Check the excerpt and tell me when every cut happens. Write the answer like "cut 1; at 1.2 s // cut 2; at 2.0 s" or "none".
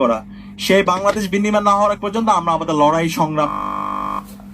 none